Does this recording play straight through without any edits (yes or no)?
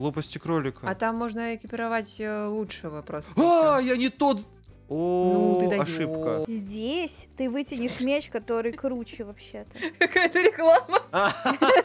no